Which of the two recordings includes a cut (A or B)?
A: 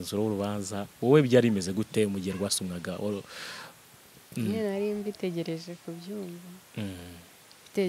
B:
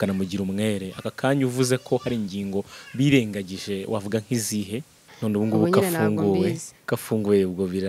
B